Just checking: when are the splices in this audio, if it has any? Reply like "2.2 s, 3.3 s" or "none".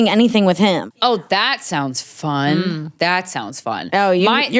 1.0 s